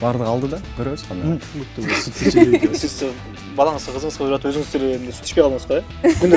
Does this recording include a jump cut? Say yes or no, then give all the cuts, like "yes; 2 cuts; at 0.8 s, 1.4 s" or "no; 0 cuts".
yes; 1 cut; at 1.4 s